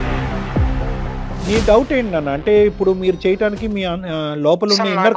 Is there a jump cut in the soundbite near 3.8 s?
no; 1 cut; at 1.4 s

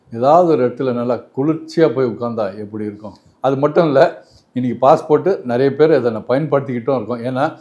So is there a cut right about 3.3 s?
yes; 1 cut; at 3.3 s

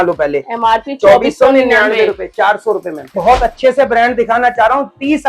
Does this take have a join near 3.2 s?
yes; 1 cut; at 3.2 s

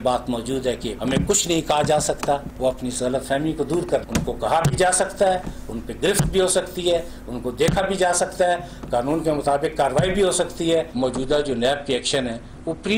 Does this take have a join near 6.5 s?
no; 1 cut; at 10.9 s

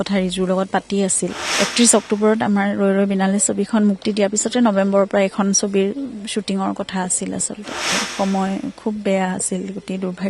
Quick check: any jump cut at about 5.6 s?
no; 2 cuts; at 1.5 s, 8.0 s

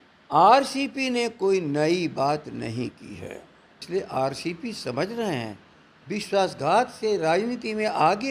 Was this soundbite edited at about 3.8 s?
yes; 1 cut; at 3.8 s

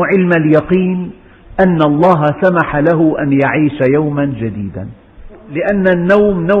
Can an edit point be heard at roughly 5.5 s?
yes; 1 cut; at 5.5 s

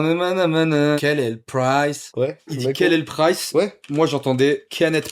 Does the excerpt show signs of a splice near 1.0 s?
yes; 2 cuts; at 1.0 s, 2.6 s

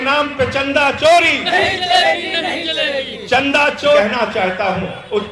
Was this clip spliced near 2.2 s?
no; 1 cut; at 4.0 s

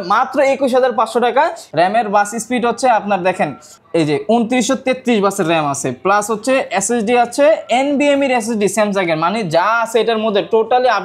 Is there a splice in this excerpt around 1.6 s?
yes; 1 cut; at 1.6 s

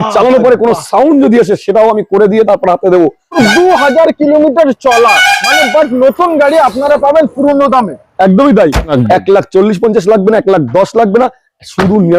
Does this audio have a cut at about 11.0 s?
no; 2 cuts; at 3.3 s, 8.9 s

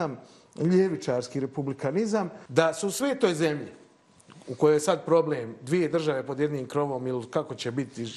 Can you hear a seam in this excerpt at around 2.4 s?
yes; 1 cut; at 2.4 s

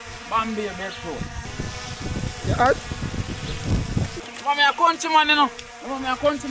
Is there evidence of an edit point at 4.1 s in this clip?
yes; 2 cuts; at 1.5 s, 4.1 s

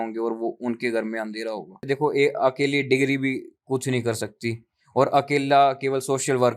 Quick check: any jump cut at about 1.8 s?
yes; 1 cut; at 1.8 s

